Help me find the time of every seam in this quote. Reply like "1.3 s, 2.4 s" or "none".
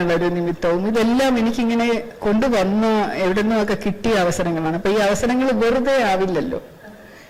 none